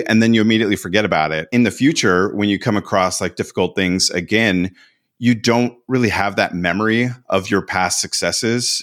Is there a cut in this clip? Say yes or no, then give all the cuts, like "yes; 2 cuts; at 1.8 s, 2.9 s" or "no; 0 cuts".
yes; 1 cut; at 1.5 s